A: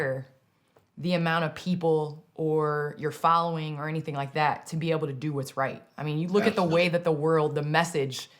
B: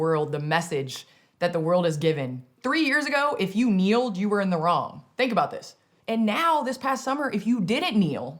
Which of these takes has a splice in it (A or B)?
B